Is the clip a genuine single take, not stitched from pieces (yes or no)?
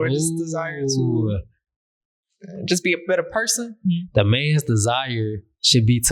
no